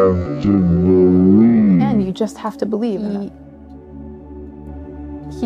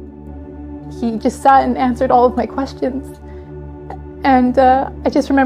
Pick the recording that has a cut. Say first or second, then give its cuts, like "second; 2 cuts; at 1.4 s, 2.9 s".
first; 2 cuts; at 1.9 s, 3.0 s